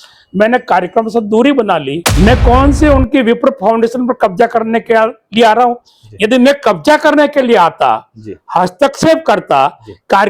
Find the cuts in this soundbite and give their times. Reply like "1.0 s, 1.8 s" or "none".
2.0 s